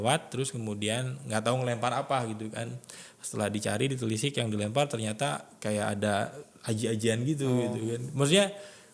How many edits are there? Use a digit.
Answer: 0